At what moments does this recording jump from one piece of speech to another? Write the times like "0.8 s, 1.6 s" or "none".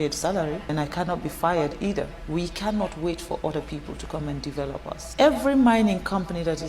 0.7 s, 2.2 s, 5.1 s